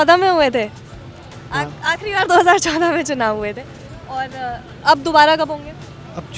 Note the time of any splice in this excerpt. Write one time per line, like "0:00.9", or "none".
none